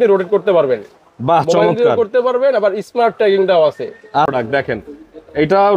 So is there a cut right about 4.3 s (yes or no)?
yes